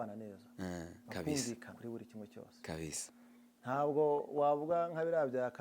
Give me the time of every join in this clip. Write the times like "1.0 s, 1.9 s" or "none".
1.7 s